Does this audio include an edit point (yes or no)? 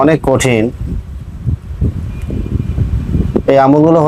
no